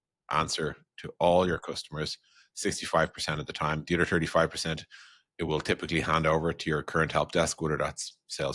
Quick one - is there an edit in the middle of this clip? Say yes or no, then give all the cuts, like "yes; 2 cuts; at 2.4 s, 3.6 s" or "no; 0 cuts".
no; 0 cuts